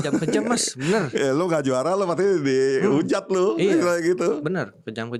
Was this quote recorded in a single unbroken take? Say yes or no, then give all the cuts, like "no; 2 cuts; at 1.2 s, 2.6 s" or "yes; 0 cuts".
yes; 0 cuts